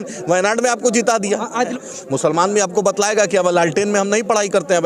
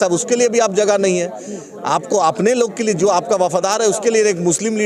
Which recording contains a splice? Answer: first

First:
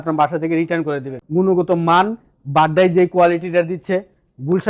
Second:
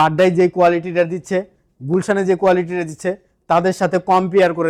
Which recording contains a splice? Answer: first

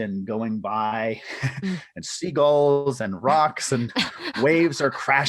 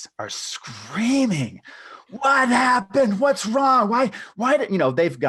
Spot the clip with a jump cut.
first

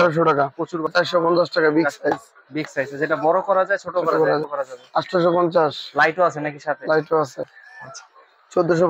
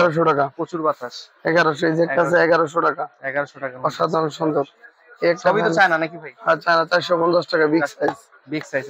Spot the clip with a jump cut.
first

